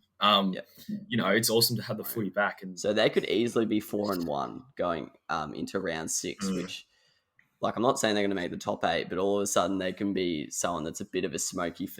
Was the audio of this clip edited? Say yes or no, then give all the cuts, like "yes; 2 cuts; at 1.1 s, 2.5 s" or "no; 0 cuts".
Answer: yes; 1 cut; at 2.6 s